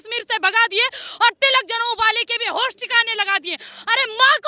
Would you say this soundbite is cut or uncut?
uncut